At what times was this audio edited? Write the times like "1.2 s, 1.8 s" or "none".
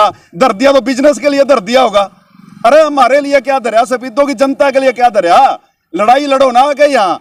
none